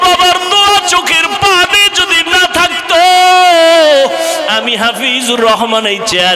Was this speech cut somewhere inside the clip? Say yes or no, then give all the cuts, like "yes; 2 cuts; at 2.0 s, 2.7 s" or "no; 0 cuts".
no; 0 cuts